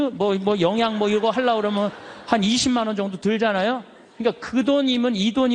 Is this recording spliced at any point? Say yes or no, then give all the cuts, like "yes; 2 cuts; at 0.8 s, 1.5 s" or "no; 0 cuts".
no; 0 cuts